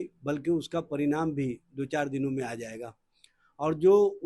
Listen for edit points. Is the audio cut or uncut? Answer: uncut